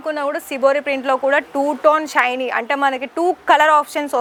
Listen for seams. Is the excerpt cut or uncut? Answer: uncut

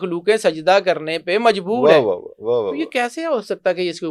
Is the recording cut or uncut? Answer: uncut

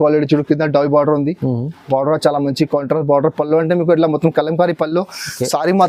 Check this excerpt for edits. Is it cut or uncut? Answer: uncut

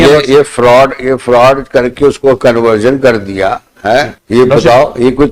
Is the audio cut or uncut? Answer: uncut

